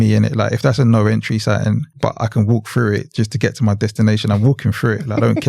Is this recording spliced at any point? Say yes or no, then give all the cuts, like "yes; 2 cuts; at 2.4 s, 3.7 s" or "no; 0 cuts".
yes; 1 cut; at 1.9 s